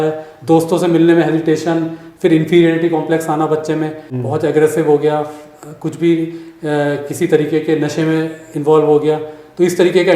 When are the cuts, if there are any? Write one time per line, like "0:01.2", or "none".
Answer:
0:04.1